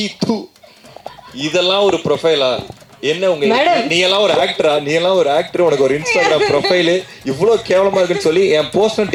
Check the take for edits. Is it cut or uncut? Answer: uncut